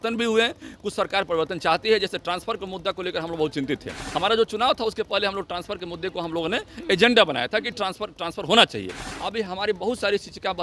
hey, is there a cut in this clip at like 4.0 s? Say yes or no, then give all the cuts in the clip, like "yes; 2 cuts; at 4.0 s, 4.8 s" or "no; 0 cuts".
yes; 2 cuts; at 4.0 s, 9.1 s